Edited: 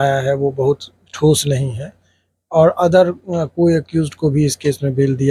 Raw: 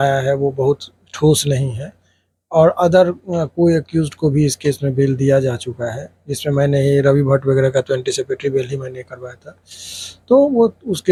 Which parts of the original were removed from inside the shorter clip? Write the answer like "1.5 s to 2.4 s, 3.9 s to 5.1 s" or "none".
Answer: none